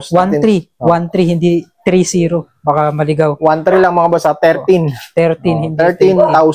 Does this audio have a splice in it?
no; 0 cuts

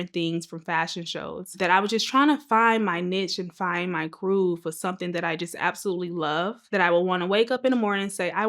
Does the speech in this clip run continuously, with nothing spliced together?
no; 2 cuts; at 1.6 s, 6.6 s

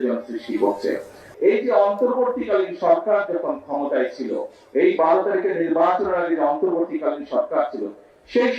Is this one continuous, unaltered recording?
no; 1 cut; at 1.3 s

